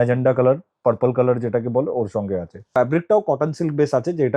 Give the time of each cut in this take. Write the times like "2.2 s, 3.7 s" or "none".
2.7 s

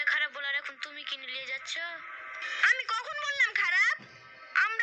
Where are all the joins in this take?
2.5 s

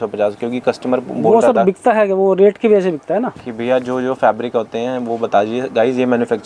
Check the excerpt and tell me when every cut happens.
none

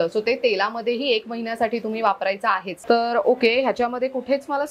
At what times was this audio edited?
2.7 s

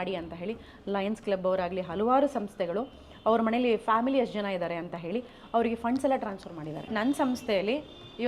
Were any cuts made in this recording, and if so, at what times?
6.9 s

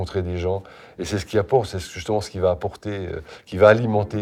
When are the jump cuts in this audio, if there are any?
none

